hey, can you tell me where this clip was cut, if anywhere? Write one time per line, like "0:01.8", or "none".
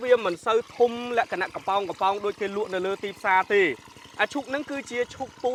none